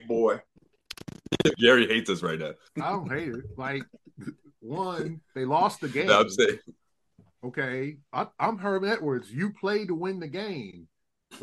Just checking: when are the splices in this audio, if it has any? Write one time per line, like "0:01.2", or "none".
0:02.6